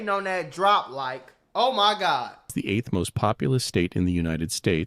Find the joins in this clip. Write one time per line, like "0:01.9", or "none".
0:02.5